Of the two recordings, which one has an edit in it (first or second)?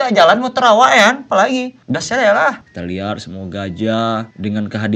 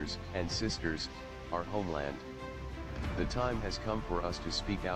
first